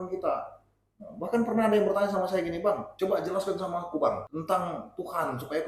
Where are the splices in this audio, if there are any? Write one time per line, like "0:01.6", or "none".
0:02.9
0:04.3